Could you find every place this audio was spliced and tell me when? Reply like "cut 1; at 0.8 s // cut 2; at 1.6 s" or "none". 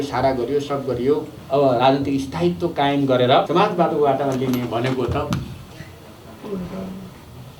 cut 1; at 1.3 s // cut 2; at 3.5 s